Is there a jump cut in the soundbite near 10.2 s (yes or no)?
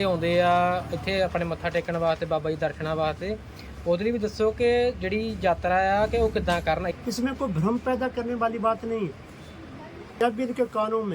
yes